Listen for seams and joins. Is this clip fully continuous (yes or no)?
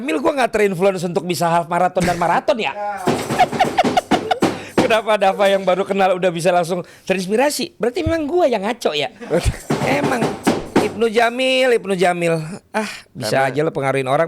yes